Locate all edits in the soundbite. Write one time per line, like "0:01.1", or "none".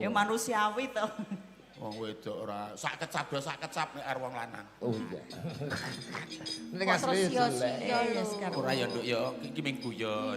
0:05.3